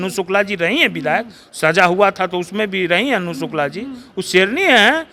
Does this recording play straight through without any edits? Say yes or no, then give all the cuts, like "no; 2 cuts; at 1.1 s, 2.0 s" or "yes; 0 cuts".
yes; 0 cuts